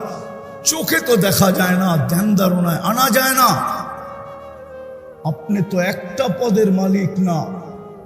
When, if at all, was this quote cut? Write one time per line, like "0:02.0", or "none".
0:04.0
0:05.2